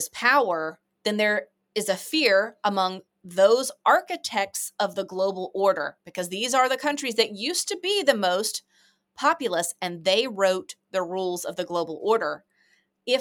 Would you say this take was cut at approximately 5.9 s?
no; 0 cuts

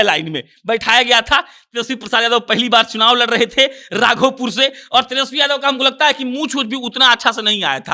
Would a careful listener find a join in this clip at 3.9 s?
no; 0 cuts

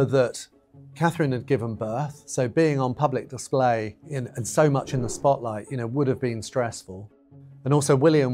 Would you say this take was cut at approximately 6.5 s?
yes; 1 cut; at 6.5 s

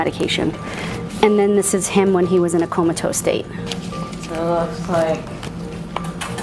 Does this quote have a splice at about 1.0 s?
yes; 1 cut; at 1.0 s

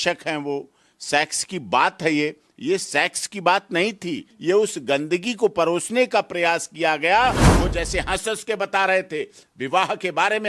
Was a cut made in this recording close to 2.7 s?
no; 2 cuts; at 4.3 s, 7.5 s

